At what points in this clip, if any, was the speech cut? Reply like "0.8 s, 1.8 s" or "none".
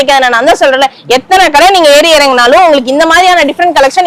none